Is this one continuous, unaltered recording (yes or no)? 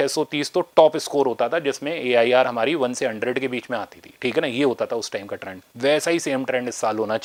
yes